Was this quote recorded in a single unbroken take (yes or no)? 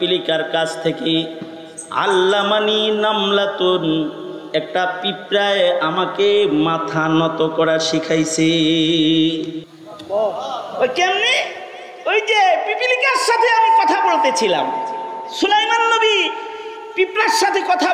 yes